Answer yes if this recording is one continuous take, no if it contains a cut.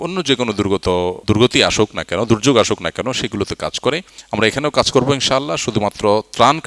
no